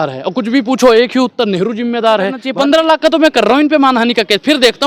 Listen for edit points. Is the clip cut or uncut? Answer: cut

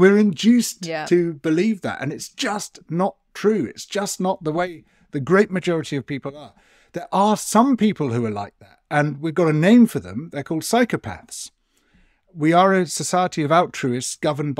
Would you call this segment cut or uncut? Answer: uncut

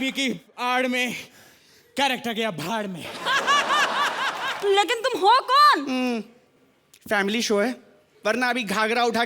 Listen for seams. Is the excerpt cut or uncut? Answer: cut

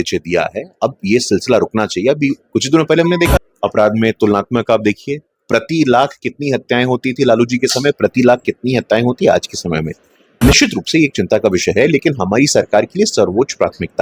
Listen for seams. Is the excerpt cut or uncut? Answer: cut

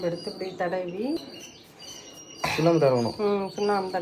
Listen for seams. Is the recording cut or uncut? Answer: cut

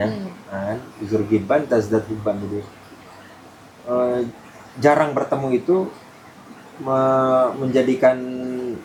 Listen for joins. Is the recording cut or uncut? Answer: uncut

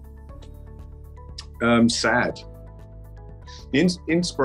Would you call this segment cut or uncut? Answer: cut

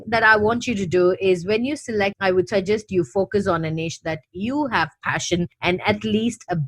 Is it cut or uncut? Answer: cut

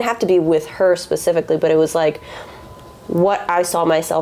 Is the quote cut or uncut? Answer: uncut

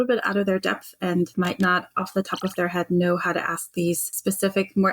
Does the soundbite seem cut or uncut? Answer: cut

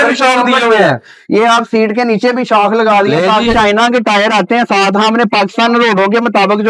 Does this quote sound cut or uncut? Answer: cut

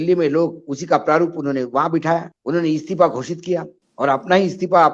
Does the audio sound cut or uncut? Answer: cut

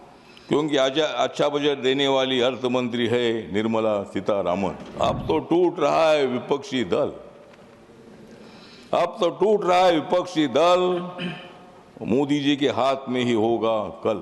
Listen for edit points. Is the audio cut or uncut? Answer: cut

